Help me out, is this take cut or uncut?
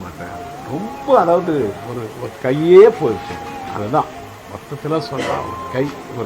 cut